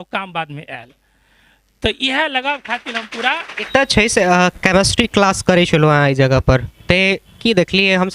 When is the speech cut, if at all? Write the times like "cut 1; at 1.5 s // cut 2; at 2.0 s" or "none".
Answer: cut 1; at 3.7 s